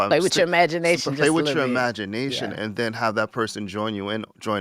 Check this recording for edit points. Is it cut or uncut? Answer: uncut